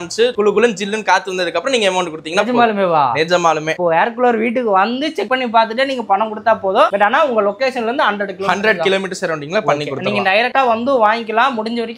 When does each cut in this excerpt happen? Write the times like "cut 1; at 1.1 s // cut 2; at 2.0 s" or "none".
none